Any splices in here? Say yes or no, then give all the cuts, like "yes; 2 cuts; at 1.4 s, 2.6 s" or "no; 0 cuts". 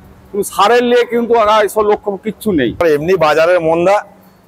yes; 1 cut; at 2.8 s